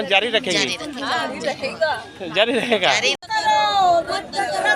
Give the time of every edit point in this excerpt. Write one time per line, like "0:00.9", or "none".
0:03.1